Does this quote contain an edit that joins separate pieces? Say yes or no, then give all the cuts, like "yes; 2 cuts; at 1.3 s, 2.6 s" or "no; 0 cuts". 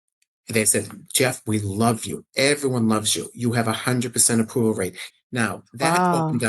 yes; 1 cut; at 5.0 s